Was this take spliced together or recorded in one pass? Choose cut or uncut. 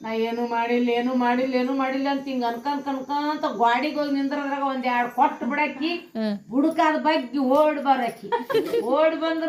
uncut